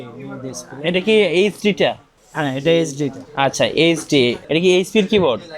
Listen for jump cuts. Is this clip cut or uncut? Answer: cut